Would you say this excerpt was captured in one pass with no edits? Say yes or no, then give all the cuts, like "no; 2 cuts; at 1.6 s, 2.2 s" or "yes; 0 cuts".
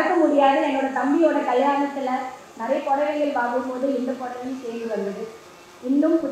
yes; 0 cuts